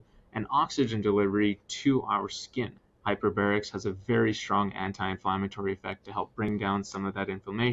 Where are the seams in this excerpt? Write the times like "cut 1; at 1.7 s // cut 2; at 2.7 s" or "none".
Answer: cut 1; at 2.8 s